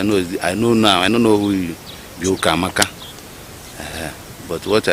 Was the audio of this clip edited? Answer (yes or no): no